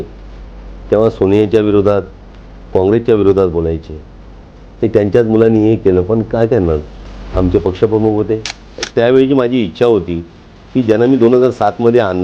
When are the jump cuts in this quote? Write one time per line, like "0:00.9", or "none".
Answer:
0:08.8

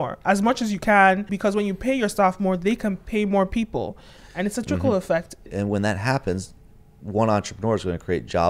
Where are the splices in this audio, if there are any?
0:01.3
0:05.5

